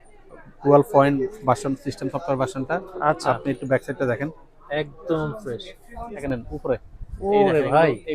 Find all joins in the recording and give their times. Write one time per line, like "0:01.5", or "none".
0:06.2